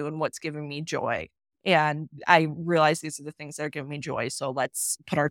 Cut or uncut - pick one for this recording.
uncut